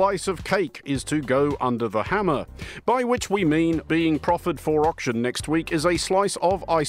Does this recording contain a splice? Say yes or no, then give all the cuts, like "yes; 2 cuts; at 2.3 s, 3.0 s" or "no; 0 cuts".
yes; 2 cuts; at 2.4 s, 3.8 s